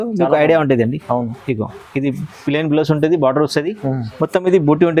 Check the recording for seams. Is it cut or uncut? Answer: uncut